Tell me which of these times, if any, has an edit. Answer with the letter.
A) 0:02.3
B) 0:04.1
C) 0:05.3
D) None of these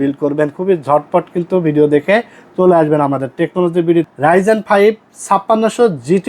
B